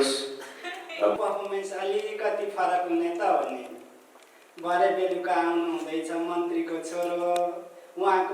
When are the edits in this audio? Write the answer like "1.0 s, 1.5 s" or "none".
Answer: 1.2 s